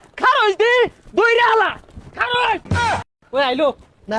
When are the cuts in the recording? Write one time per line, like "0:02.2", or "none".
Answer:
none